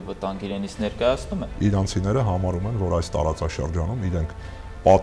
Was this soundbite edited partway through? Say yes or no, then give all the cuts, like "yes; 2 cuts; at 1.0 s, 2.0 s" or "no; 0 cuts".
yes; 1 cut; at 1.5 s